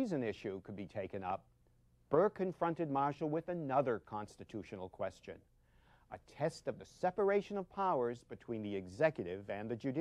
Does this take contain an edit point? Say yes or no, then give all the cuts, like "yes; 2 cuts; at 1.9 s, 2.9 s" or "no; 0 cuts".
no; 0 cuts